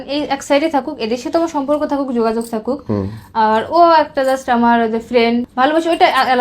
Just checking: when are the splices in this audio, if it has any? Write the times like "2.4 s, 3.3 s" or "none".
5.5 s